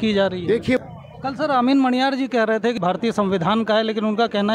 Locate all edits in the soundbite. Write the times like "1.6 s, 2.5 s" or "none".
0.8 s, 2.8 s